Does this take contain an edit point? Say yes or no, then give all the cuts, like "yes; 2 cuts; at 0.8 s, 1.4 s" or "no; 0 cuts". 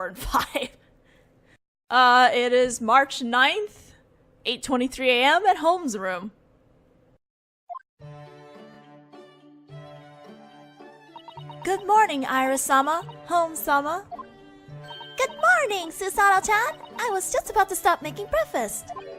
no; 0 cuts